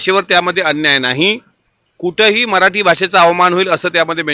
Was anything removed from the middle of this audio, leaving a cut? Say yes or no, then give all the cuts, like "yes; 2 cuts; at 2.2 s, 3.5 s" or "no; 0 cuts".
no; 0 cuts